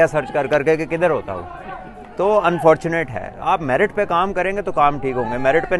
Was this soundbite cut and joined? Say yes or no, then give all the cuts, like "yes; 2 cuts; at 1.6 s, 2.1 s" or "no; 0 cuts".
no; 0 cuts